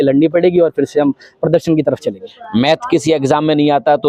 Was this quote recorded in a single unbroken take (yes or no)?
no